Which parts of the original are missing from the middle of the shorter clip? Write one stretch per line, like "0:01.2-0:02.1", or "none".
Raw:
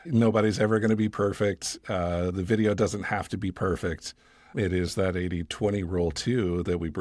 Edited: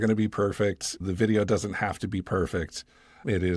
0:01.8-0:02.3